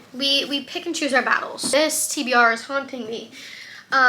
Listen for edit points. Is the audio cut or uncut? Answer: cut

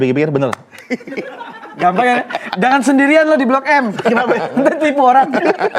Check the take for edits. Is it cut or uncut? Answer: uncut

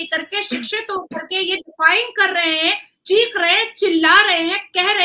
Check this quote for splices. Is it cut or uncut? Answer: uncut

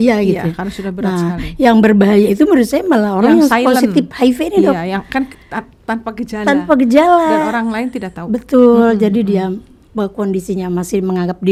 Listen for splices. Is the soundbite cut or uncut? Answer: uncut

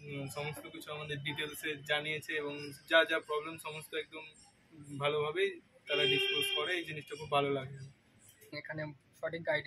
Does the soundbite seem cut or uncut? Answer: cut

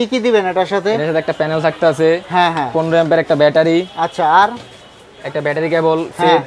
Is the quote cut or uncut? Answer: uncut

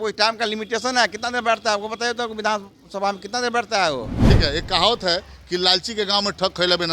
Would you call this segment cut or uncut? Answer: cut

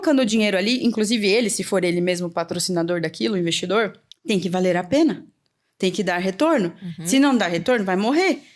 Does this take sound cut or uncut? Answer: cut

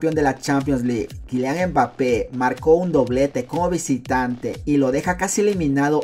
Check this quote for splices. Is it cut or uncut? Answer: uncut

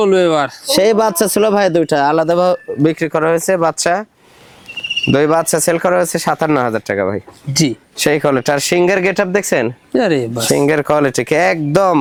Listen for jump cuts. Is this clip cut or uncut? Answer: uncut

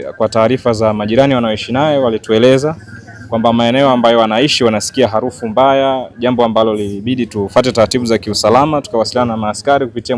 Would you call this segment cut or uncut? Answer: uncut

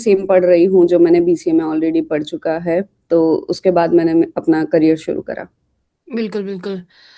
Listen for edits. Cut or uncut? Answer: uncut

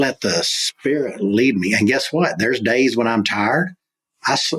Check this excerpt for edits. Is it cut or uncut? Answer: uncut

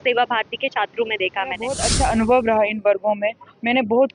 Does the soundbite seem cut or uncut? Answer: cut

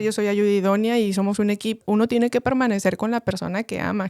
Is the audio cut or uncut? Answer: cut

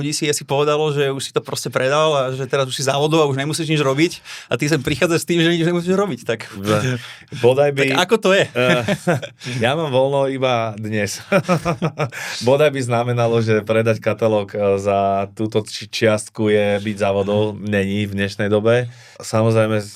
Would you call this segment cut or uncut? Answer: uncut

